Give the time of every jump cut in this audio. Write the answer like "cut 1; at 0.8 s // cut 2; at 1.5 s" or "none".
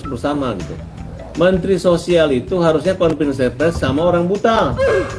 none